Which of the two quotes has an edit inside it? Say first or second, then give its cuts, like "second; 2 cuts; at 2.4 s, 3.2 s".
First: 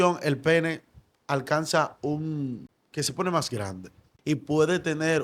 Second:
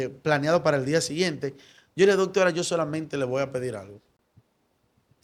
first; 2 cuts; at 2.7 s, 4.1 s